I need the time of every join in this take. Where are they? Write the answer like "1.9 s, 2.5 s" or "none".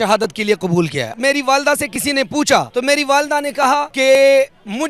1.1 s, 2.7 s, 3.9 s